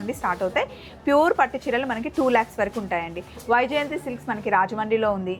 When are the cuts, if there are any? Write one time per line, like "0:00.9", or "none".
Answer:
none